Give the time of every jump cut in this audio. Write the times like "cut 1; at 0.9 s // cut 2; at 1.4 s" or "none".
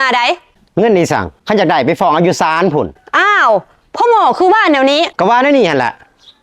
cut 1; at 1.3 s // cut 2; at 5.1 s